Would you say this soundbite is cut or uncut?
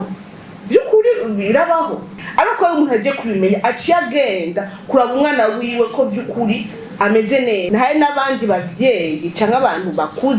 cut